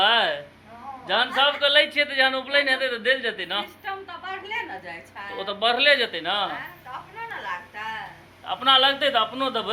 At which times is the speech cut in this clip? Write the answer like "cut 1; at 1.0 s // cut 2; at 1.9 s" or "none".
none